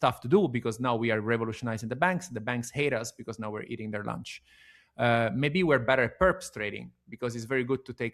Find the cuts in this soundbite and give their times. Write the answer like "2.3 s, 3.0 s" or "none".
none